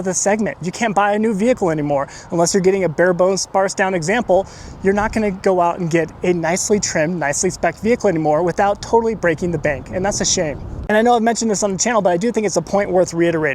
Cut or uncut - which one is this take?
uncut